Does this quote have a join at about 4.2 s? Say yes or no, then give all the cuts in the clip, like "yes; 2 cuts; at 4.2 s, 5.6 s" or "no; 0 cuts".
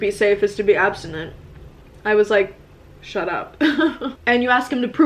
yes; 1 cut; at 4.2 s